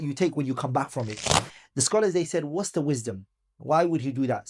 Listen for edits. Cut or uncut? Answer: cut